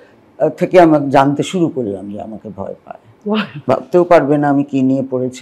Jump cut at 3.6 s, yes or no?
yes